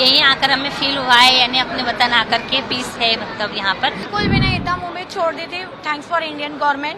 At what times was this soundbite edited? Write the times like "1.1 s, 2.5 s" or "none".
4.0 s